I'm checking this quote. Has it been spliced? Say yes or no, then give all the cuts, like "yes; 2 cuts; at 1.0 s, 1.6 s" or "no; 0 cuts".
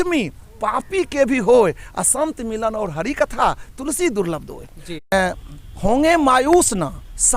yes; 1 cut; at 5.1 s